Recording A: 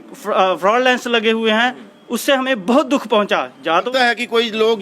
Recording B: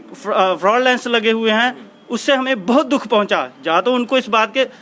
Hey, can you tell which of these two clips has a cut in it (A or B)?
A